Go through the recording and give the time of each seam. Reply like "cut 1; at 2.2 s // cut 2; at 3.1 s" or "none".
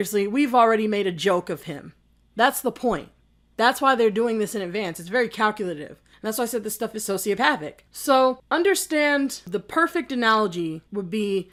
none